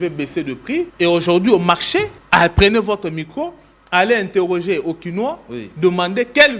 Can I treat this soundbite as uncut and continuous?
no; 2 cuts; at 0.9 s, 2.2 s

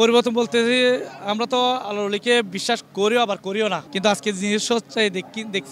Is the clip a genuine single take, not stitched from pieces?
no; 1 cut; at 3.9 s

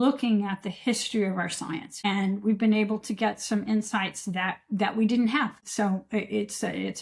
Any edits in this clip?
yes; 2 cuts; at 1.9 s, 5.6 s

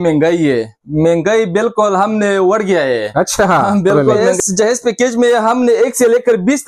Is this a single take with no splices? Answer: no; 1 cut; at 4.0 s

